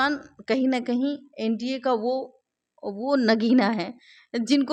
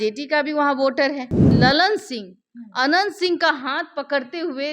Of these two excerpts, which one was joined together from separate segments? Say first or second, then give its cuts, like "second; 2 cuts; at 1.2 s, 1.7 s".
second; 1 cut; at 1.5 s